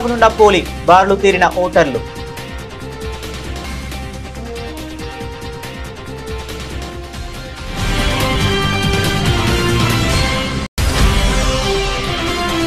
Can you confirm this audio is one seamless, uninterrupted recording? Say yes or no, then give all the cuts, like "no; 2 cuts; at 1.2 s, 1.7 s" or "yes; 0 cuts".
yes; 0 cuts